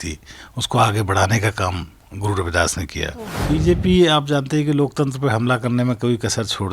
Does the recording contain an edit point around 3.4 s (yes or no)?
yes